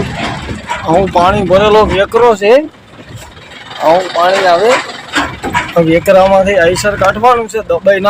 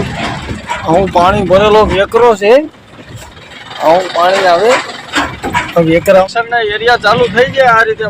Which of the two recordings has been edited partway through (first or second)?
second